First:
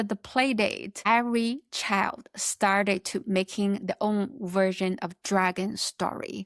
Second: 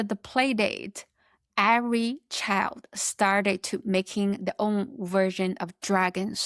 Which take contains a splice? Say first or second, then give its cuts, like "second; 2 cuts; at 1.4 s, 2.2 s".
first; 1 cut; at 1.1 s